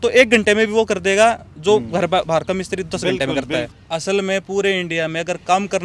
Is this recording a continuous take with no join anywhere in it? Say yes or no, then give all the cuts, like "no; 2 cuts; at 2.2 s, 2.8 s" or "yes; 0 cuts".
no; 1 cut; at 3.8 s